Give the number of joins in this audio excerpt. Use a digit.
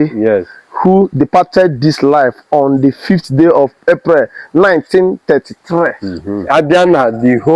1